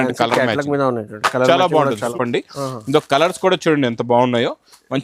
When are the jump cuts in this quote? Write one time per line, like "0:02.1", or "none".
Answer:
0:02.1